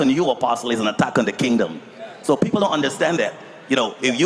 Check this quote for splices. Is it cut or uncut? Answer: uncut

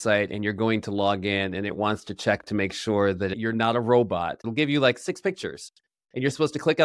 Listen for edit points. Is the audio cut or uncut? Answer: cut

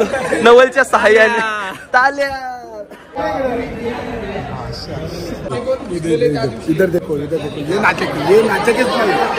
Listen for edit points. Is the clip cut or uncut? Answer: uncut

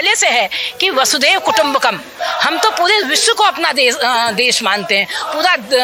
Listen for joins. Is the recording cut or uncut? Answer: uncut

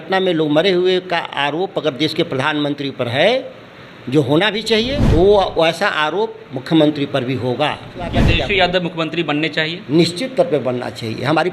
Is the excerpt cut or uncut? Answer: cut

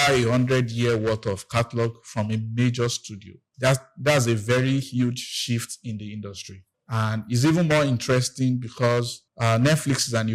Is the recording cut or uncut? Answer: cut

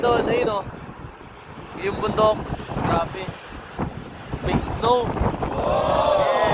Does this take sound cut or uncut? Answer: cut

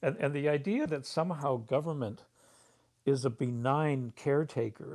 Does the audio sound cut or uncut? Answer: uncut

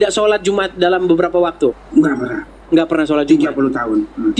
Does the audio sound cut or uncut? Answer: cut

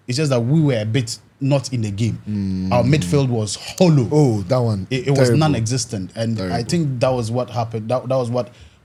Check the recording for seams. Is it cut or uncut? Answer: uncut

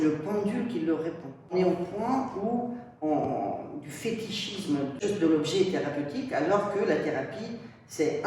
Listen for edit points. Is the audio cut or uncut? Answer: cut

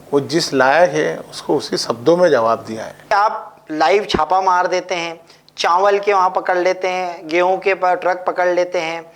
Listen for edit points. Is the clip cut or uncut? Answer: cut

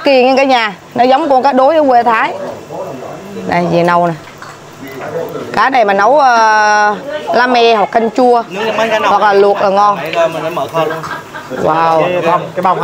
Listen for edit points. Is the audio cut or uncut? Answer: uncut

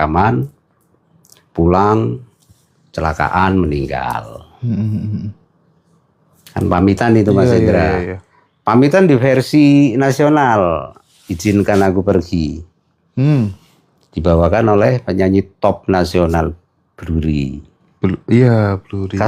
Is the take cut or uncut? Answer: uncut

